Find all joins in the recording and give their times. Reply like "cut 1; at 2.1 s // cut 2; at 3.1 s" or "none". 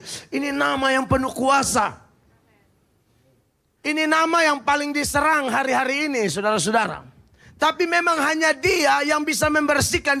none

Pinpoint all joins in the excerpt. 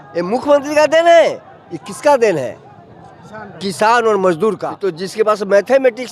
cut 1; at 4.7 s

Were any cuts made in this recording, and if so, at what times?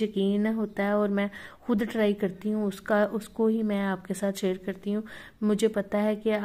none

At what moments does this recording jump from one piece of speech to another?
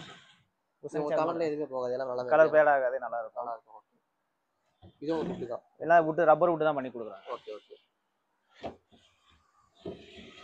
none

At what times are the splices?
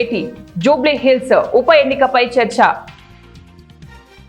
cut 1; at 2.9 s

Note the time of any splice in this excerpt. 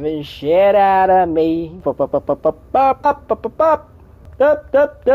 cut 1; at 1.8 s // cut 2; at 3.0 s // cut 3; at 4.2 s

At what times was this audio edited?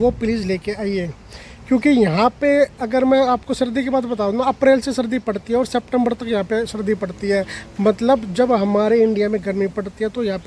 none

